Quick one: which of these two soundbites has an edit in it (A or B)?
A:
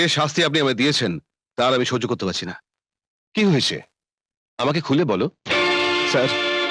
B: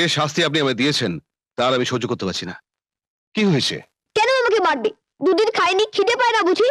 B